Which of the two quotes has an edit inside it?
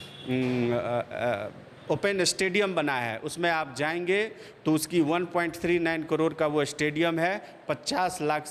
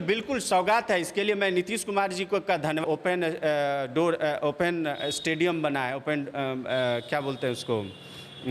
second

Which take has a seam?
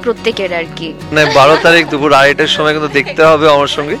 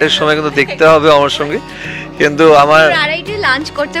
first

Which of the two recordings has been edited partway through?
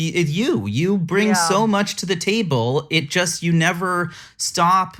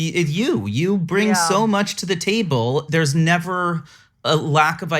second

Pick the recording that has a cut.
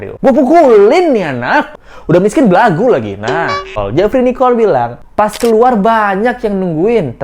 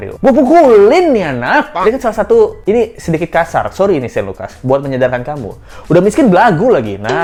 first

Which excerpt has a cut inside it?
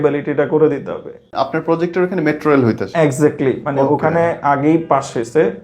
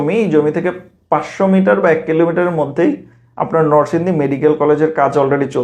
first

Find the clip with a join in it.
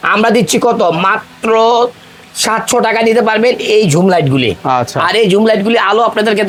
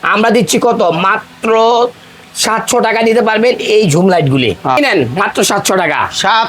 second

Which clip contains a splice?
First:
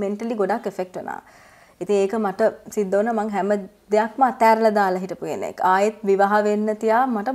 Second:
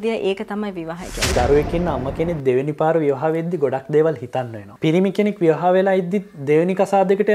second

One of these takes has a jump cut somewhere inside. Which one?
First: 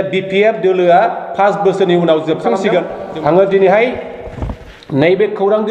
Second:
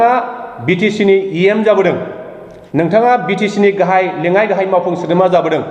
first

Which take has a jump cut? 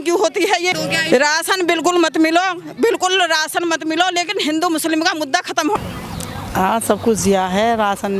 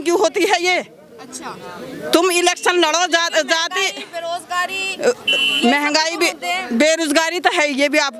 first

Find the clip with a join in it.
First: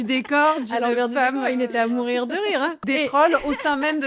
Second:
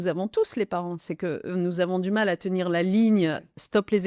first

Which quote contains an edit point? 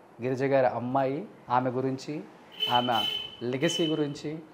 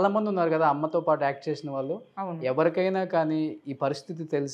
first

